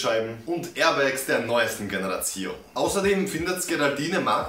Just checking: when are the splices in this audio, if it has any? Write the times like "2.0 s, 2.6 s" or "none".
2.7 s